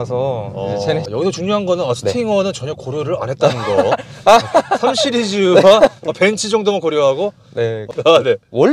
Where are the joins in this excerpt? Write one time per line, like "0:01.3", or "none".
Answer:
0:01.1
0:08.0